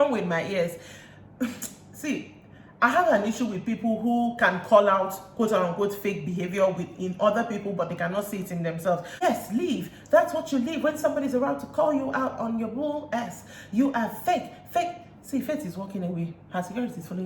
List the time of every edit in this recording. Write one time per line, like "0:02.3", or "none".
0:09.1